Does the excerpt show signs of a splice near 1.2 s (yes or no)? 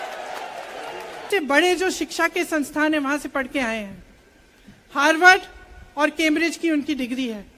yes